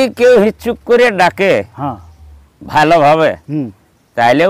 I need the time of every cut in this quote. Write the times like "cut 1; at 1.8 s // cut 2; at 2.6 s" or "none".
none